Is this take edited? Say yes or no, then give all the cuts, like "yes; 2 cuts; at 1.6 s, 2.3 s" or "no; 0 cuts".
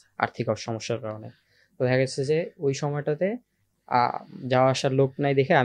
no; 0 cuts